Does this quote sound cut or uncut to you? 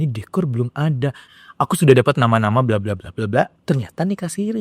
cut